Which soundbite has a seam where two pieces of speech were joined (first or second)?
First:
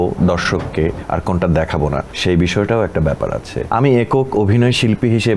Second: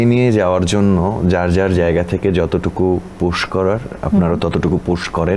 first